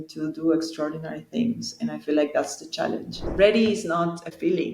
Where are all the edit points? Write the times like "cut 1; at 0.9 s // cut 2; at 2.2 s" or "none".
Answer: cut 1; at 3.2 s